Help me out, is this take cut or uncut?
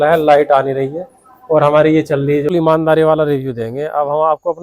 cut